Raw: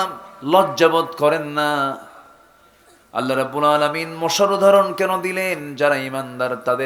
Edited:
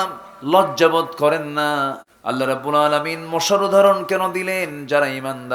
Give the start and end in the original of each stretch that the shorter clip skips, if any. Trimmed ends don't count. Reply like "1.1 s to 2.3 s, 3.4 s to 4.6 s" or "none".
2.1 s to 3.0 s